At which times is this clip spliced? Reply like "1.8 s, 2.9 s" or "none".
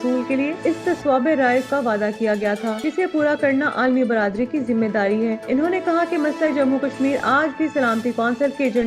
none